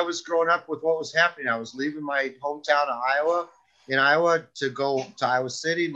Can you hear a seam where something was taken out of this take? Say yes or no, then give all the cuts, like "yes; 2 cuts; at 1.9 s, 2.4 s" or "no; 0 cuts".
no; 0 cuts